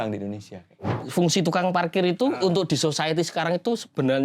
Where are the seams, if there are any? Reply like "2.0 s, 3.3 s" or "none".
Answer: 1.0 s